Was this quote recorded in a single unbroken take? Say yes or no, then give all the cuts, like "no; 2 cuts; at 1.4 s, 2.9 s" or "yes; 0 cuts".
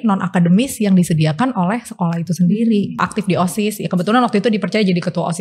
no; 1 cut; at 3.0 s